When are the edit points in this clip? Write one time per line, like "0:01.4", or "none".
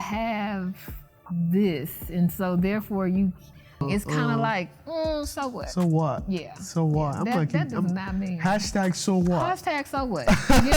0:03.8